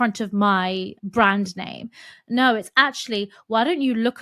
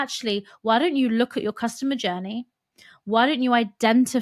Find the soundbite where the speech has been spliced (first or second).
first